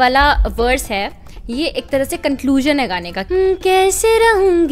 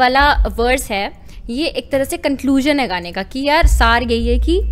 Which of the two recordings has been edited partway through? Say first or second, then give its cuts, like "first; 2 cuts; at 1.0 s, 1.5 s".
first; 1 cut; at 3.1 s